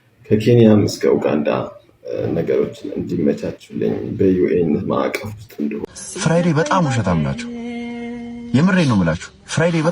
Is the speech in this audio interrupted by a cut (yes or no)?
yes